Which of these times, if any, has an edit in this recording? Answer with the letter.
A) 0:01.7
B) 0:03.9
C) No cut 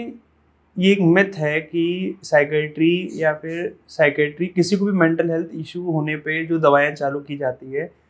C